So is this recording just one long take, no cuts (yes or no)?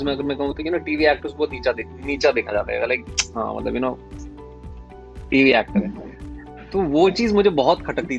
yes